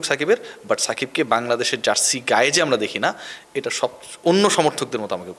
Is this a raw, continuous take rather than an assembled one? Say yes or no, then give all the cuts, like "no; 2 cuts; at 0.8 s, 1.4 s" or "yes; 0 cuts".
yes; 0 cuts